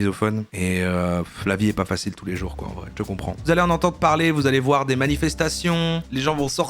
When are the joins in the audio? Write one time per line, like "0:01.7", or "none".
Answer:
0:03.4